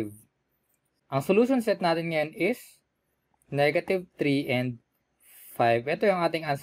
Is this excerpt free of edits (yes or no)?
no